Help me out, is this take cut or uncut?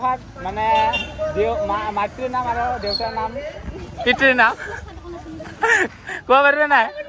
uncut